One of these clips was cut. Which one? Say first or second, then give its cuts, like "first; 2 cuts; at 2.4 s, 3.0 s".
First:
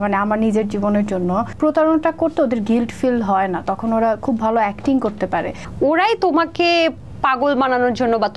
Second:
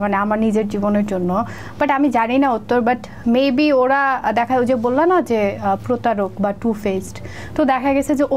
first; 2 cuts; at 1.5 s, 5.6 s